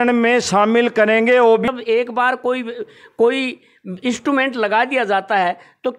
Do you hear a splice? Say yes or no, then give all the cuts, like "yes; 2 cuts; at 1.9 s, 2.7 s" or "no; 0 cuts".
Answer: yes; 1 cut; at 1.7 s